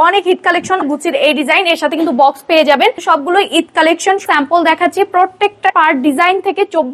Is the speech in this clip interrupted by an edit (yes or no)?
yes